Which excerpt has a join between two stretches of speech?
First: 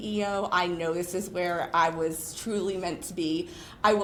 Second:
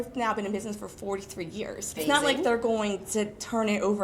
second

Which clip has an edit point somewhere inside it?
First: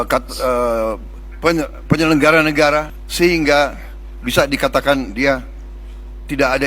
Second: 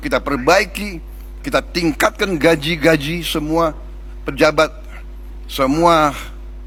first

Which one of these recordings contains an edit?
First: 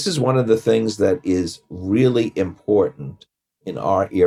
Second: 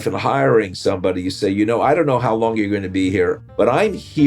second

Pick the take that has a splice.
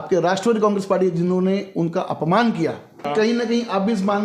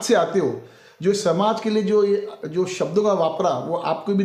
first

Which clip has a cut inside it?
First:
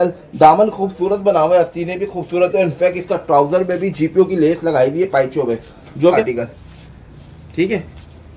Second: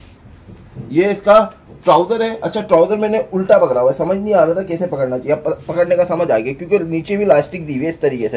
first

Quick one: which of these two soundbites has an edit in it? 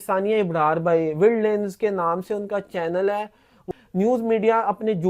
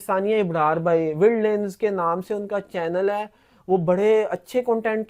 first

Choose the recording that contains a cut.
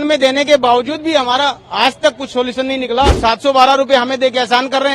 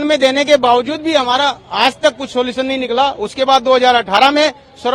first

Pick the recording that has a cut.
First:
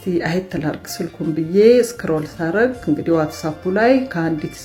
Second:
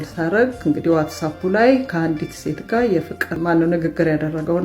second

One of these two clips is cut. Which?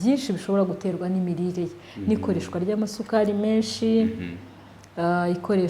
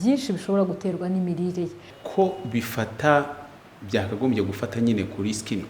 second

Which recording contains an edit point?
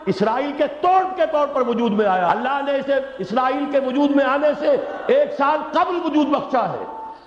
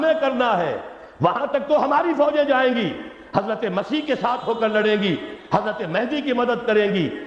first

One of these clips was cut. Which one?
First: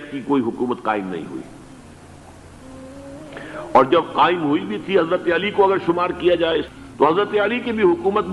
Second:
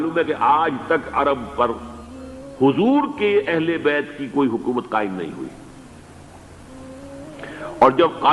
first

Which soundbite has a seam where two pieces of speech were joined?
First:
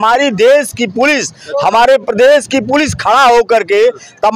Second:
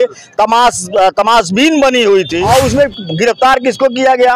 second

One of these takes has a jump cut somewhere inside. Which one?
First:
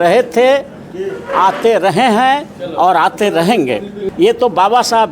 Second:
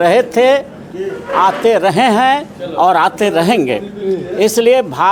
first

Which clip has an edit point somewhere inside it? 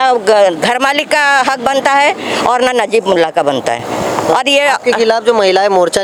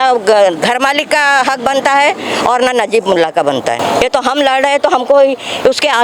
second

